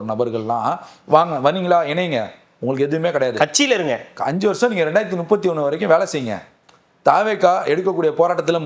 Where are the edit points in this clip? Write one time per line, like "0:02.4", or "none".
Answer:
none